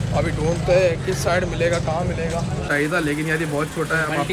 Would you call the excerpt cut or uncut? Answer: cut